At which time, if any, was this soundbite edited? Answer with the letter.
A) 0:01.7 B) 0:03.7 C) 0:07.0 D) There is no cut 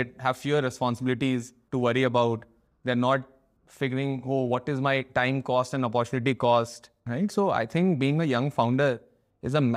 C